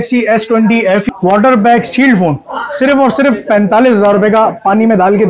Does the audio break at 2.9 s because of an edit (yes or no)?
no